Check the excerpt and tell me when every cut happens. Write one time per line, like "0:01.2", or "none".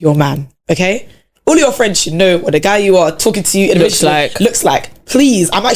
none